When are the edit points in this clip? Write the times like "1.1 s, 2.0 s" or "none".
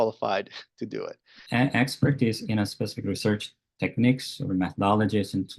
1.4 s